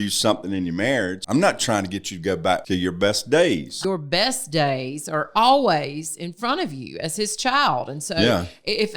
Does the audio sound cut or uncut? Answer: cut